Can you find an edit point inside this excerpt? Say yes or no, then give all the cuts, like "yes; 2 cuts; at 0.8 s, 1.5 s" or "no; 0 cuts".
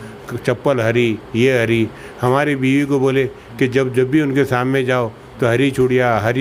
no; 0 cuts